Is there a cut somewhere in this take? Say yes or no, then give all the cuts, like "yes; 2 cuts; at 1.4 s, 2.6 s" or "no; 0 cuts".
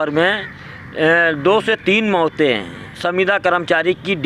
no; 0 cuts